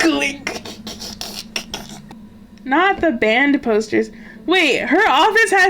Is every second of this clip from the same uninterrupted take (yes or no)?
no